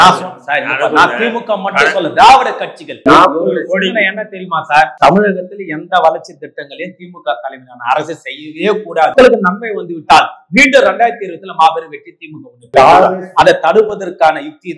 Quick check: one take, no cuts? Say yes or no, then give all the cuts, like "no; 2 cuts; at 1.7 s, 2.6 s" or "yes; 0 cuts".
no; 3 cuts; at 2.9 s, 4.9 s, 9.1 s